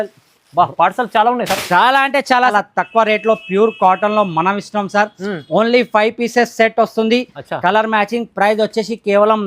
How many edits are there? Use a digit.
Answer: 1